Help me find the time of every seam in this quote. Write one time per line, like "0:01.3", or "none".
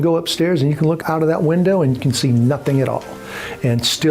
0:01.0